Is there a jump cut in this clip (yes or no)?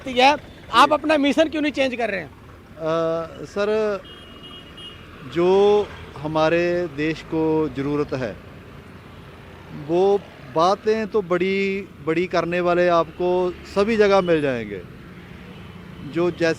no